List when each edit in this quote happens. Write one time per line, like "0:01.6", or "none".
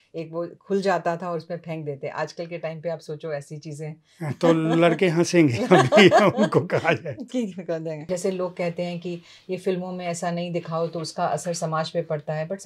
0:08.0